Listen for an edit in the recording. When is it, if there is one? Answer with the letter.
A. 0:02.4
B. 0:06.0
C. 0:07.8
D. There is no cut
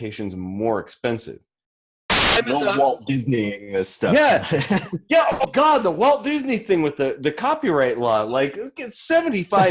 A